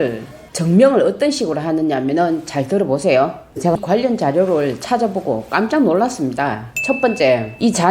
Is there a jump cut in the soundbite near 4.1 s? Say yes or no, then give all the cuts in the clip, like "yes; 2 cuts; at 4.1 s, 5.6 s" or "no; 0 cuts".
no; 1 cut; at 6.7 s